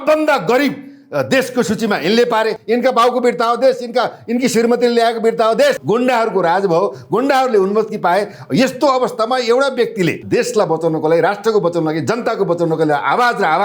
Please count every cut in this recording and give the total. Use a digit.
3